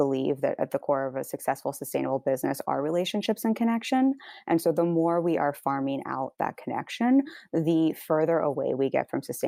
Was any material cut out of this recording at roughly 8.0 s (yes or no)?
no